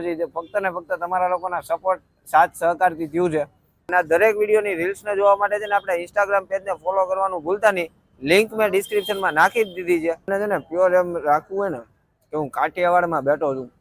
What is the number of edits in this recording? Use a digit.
2